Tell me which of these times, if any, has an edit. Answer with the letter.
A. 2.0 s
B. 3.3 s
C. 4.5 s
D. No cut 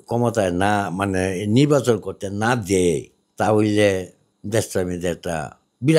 D